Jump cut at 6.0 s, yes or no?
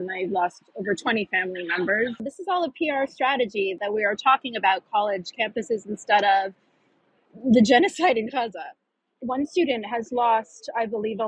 no